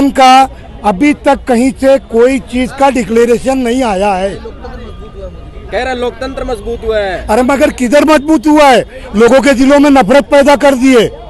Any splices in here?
no; 0 cuts

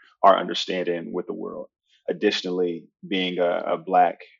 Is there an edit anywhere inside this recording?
yes; 1 cut; at 2.0 s

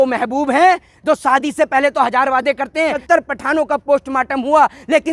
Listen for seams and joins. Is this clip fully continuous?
no; 1 cut; at 3.0 s

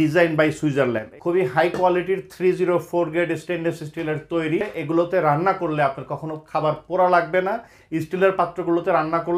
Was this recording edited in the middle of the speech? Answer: yes; 3 cuts; at 1.1 s, 4.7 s, 7.8 s

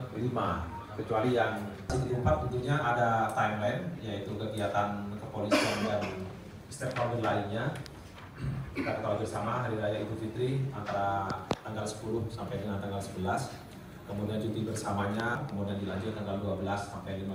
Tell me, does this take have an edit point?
no; 0 cuts

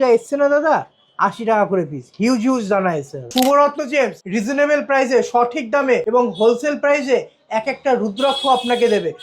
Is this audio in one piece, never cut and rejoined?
no; 3 cuts; at 3.3 s, 4.2 s, 6.0 s

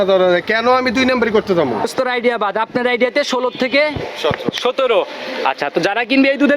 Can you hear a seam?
yes; 1 cut; at 1.8 s

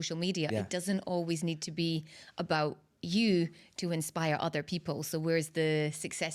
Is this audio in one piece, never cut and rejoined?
yes; 0 cuts

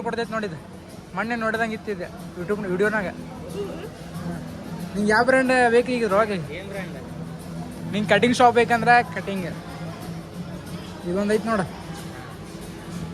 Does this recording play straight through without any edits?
yes; 0 cuts

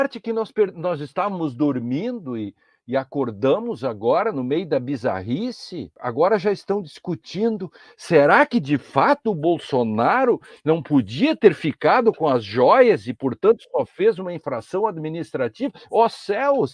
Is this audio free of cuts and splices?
no; 1 cut; at 6.0 s

